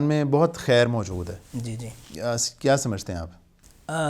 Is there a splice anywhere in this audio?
no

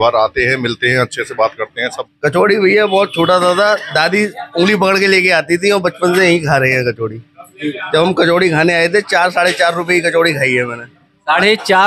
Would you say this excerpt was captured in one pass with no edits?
no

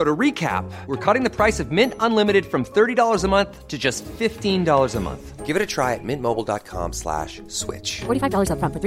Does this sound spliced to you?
no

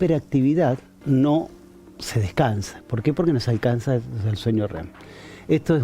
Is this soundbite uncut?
no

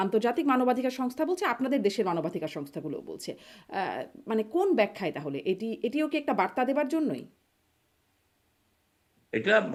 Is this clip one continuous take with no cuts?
yes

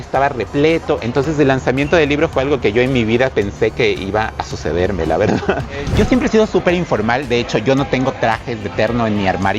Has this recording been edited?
yes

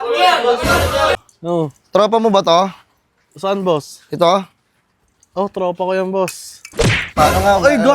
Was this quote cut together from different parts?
yes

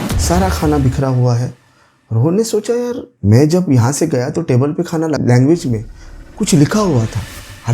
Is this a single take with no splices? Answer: no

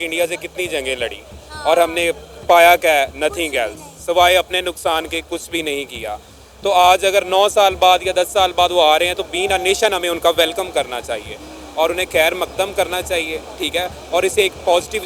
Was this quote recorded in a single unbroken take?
yes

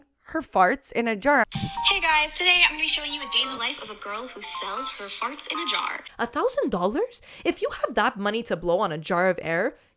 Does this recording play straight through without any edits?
no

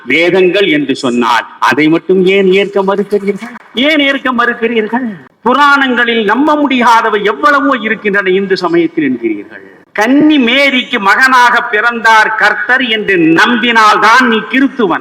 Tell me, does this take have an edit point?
no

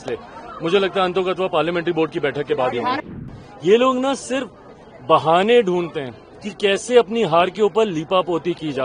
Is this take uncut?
no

